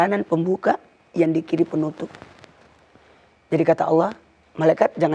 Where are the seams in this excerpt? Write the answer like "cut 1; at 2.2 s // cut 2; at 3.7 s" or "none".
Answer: none

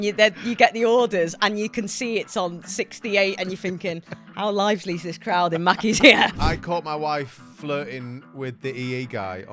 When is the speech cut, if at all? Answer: cut 1; at 6.4 s

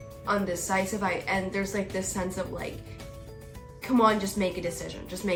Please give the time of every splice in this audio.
none

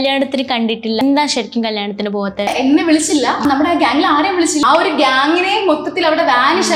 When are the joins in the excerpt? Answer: cut 1; at 1.0 s // cut 2; at 2.5 s // cut 3; at 3.4 s // cut 4; at 4.6 s

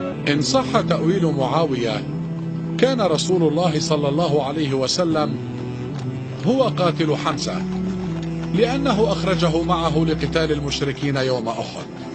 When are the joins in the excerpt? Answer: none

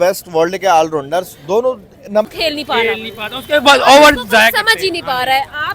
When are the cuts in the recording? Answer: cut 1; at 2.3 s

